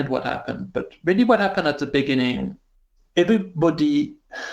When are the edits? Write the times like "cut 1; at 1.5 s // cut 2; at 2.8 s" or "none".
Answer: cut 1; at 3.0 s